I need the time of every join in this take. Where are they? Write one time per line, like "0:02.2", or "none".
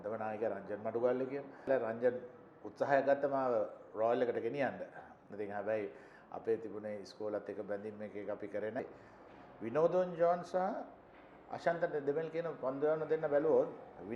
0:01.7
0:08.8